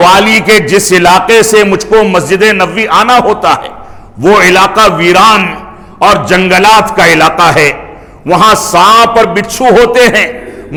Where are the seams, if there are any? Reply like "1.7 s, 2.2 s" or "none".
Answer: none

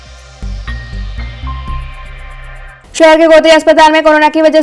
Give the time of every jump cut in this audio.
2.7 s

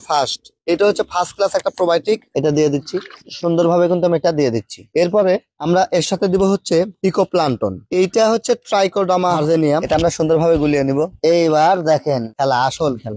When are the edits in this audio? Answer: 2.3 s, 9.8 s

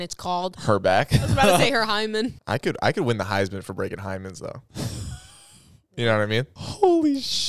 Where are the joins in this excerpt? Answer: 2.4 s, 6.5 s

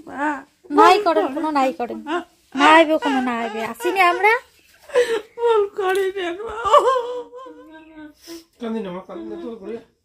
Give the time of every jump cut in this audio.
7.3 s

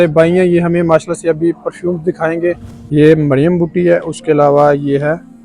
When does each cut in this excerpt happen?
2.7 s

